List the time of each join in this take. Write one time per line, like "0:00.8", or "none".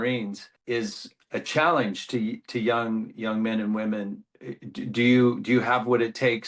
0:01.0